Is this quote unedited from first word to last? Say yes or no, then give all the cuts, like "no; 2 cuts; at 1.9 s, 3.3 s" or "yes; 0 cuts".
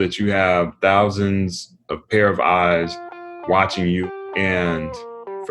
no; 1 cut; at 4.1 s